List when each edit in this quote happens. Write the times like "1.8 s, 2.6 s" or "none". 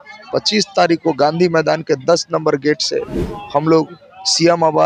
none